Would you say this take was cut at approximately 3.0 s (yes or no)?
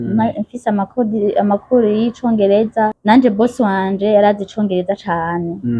yes